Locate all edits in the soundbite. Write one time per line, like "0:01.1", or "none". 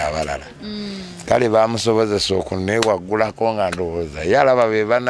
none